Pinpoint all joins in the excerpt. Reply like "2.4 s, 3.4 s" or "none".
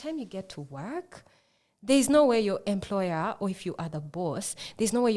none